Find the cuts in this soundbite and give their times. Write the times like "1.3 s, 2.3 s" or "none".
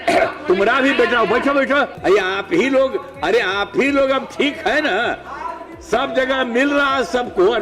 2.0 s